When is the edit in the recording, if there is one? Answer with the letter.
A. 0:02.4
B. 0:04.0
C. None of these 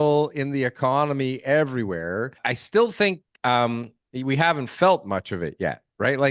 A